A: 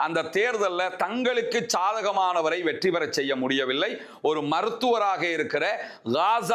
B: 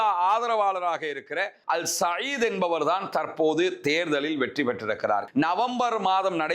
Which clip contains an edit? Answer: B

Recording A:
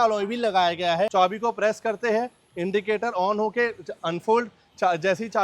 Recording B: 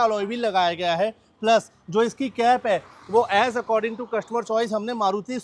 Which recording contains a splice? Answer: A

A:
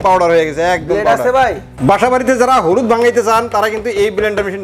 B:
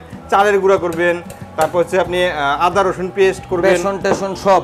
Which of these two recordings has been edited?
A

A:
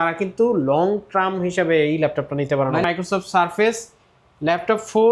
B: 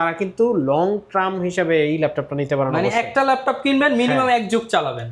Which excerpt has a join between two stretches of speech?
A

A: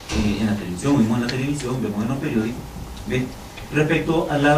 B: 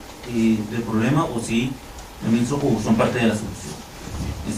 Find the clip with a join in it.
A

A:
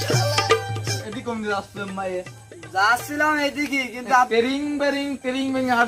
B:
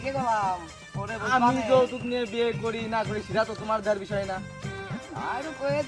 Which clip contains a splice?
A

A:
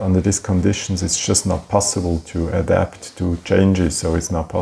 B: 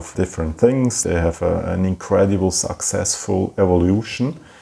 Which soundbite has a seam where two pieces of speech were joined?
B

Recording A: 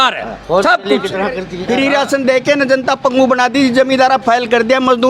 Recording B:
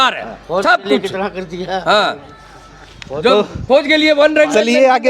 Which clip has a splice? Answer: A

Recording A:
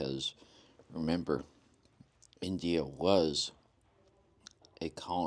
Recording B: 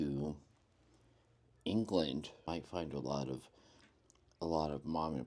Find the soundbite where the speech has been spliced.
B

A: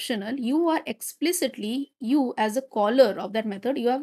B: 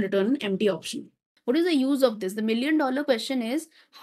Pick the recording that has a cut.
B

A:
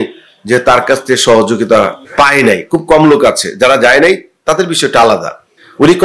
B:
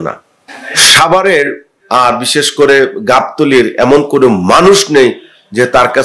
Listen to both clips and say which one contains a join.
A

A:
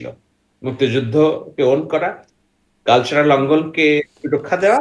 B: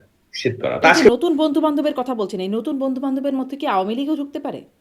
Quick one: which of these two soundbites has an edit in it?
B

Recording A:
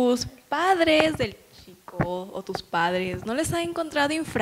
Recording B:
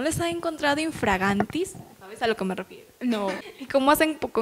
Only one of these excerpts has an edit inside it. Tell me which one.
B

